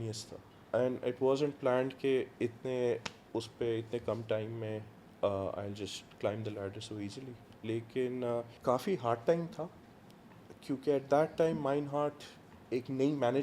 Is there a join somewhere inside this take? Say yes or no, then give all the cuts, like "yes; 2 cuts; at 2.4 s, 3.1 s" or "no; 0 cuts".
yes; 1 cut; at 8.5 s